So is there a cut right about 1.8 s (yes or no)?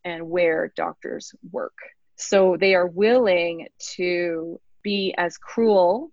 no